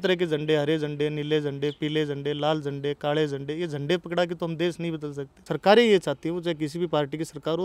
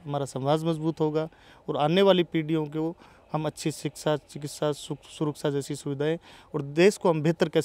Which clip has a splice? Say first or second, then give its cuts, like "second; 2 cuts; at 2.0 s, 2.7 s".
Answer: first; 1 cut; at 5.4 s